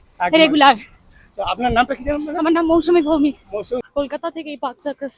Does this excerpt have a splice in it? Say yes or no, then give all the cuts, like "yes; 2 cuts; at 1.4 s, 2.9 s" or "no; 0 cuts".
yes; 1 cut; at 3.8 s